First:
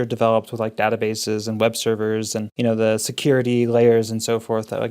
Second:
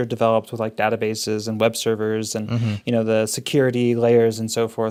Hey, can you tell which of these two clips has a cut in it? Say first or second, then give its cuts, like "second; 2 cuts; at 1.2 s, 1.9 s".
first; 1 cut; at 2.5 s